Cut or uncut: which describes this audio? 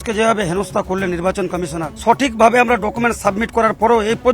cut